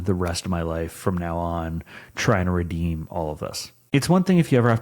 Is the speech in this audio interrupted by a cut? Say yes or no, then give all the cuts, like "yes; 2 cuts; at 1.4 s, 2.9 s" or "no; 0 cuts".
yes; 1 cut; at 3.7 s